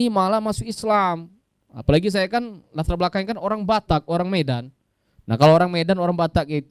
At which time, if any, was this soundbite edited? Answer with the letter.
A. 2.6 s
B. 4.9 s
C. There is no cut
C